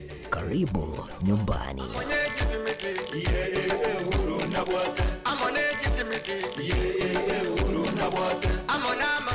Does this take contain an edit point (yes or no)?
yes